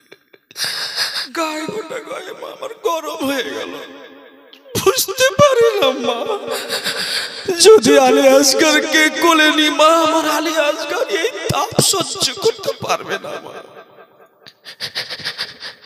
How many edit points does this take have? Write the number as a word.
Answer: one